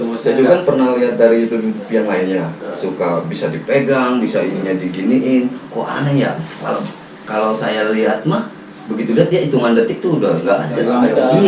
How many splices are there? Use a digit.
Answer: 0